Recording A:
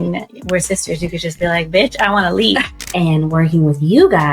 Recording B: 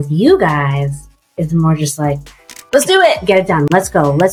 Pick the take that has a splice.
A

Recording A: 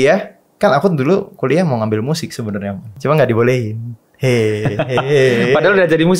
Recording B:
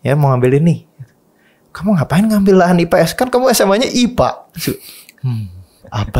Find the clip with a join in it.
A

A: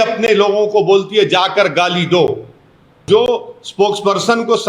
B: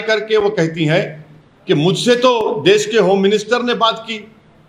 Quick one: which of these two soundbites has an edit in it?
A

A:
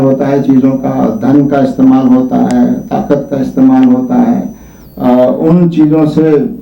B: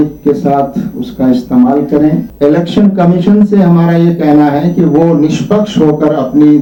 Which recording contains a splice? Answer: B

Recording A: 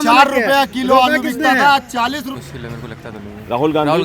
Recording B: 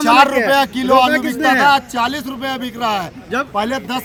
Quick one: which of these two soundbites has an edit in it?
A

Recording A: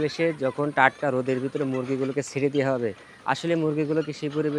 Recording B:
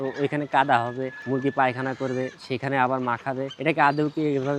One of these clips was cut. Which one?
B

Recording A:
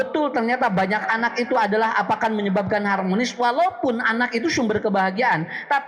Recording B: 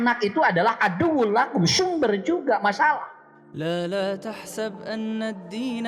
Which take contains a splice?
B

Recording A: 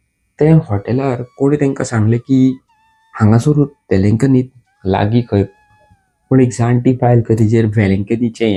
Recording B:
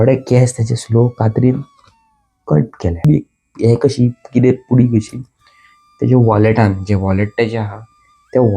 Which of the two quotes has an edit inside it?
B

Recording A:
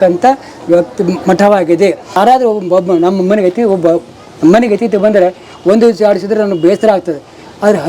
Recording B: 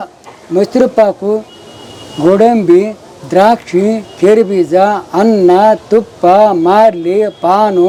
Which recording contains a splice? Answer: A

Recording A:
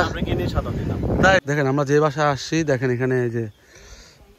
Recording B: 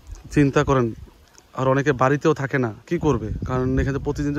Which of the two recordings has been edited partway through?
A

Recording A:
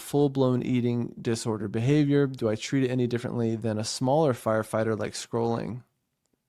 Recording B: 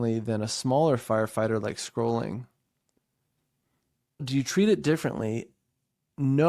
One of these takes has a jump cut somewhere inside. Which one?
B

